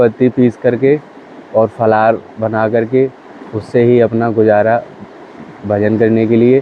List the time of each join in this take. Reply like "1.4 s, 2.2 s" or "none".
none